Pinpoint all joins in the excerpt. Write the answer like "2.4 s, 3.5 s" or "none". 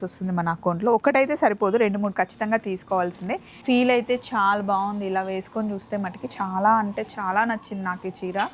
3.5 s